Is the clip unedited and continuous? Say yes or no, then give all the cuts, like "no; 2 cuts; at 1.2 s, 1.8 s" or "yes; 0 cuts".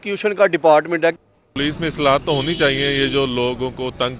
no; 1 cut; at 1.1 s